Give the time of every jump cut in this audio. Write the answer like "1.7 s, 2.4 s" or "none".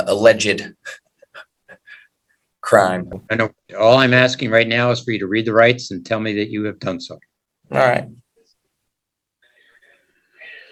none